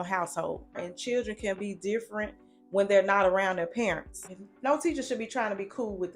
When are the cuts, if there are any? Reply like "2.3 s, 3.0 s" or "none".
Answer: 0.9 s, 4.4 s